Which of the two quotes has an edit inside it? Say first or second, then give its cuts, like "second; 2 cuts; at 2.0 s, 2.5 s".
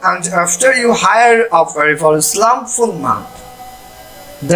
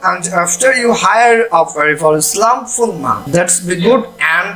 second; 1 cut; at 3.2 s